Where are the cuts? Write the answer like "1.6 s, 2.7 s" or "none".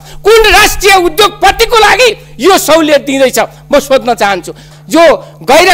4.7 s